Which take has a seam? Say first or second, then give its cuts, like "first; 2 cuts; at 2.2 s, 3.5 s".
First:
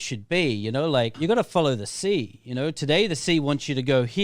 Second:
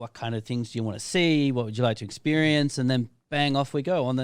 first; 1 cut; at 1.1 s